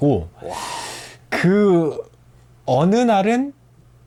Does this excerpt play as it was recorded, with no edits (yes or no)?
yes